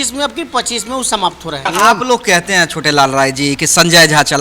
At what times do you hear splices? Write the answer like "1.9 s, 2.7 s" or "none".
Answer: 1.6 s